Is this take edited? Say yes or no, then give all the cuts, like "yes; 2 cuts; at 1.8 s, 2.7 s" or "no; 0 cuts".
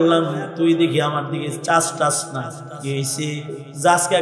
yes; 1 cut; at 2.7 s